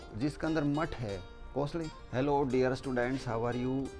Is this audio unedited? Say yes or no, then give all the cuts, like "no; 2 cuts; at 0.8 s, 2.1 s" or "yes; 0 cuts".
no; 1 cut; at 2.0 s